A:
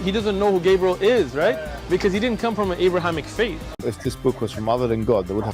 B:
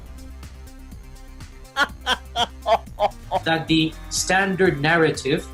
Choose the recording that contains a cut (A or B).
A